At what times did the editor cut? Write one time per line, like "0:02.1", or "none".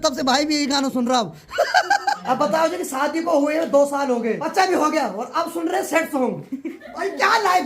0:02.2
0:04.4